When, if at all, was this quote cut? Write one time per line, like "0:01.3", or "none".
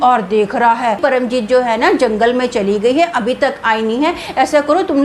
0:01.0